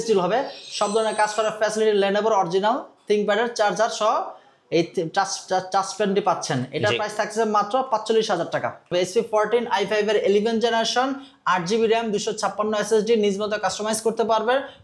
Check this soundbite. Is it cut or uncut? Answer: cut